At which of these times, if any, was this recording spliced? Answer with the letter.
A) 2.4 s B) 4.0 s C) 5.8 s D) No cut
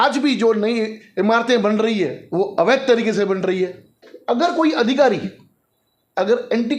B